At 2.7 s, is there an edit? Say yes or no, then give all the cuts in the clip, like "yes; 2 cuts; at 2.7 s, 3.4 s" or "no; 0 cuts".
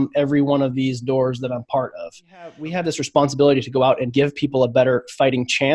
yes; 1 cut; at 2.7 s